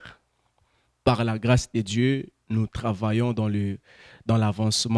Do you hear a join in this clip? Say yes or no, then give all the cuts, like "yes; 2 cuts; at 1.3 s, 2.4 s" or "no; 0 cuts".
no; 0 cuts